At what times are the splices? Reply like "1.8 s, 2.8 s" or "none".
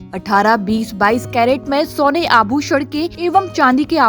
3.1 s